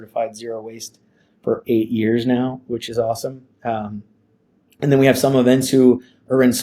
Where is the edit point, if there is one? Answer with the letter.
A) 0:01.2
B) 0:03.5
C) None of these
C